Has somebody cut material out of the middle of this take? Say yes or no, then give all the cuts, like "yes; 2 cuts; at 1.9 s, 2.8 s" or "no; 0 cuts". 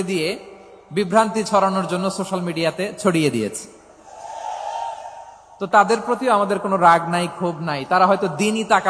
no; 0 cuts